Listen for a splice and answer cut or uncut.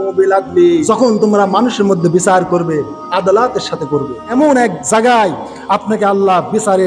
cut